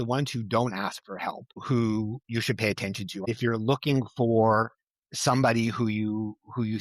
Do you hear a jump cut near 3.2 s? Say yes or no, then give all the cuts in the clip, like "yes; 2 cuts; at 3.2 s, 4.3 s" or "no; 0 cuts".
yes; 2 cuts; at 1.6 s, 3.2 s